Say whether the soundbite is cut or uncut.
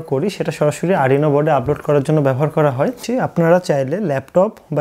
cut